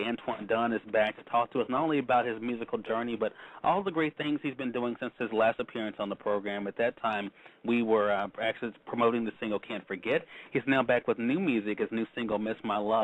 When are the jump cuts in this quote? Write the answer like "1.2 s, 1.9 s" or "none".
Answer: 3.0 s